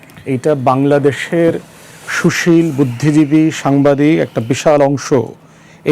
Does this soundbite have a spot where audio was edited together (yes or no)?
no